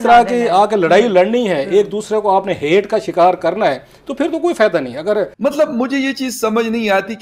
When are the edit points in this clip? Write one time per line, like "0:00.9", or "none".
0:05.3

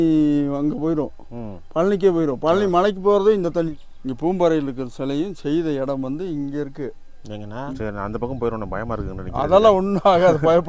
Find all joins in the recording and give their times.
0:03.7
0:07.7

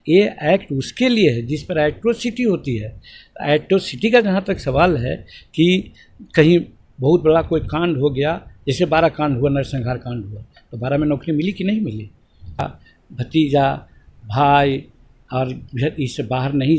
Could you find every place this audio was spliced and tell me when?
0:12.7

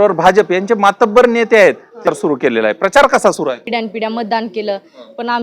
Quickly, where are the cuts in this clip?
0:02.1
0:03.6

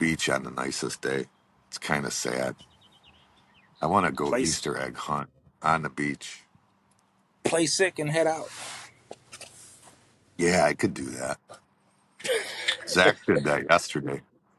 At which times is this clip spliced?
none

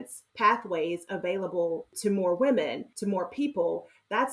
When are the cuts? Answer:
0:02.9

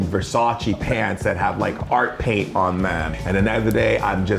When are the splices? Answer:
0:03.1

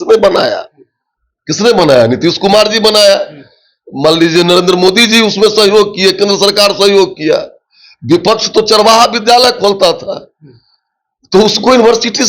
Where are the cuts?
none

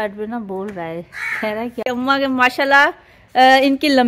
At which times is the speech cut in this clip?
0:01.8

